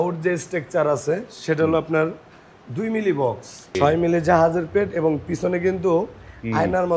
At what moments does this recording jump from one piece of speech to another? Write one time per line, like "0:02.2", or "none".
0:03.6